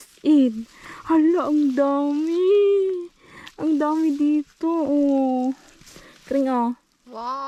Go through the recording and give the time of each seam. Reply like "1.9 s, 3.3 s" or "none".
none